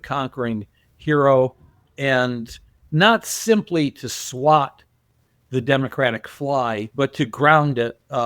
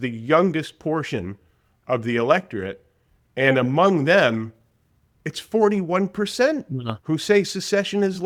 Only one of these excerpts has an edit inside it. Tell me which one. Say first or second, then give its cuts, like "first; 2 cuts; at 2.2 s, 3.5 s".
first; 2 cuts; at 2.8 s, 6.9 s